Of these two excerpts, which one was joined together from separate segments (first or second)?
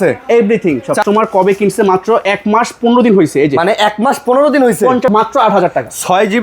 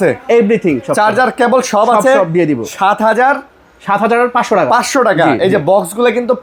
first